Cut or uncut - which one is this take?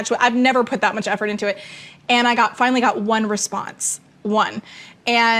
cut